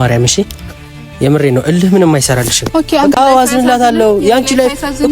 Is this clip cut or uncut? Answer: cut